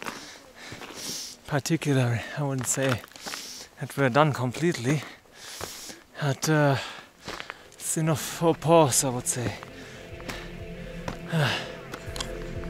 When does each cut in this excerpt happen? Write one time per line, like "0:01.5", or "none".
none